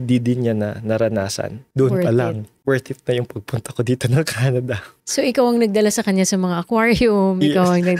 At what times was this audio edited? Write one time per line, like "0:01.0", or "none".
0:01.6